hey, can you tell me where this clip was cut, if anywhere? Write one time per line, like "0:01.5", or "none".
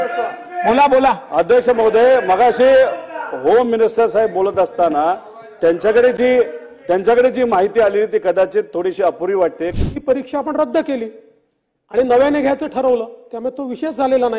0:09.7